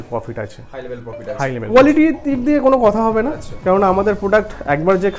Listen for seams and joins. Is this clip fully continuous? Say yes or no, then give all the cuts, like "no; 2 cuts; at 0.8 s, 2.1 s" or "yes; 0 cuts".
no; 1 cut; at 1.7 s